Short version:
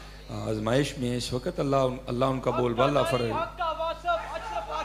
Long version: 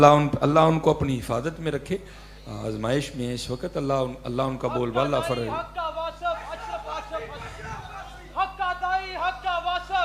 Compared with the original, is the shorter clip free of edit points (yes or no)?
yes